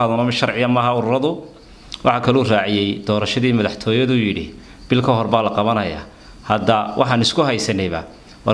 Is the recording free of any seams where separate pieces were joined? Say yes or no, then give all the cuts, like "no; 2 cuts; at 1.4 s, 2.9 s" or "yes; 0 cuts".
yes; 0 cuts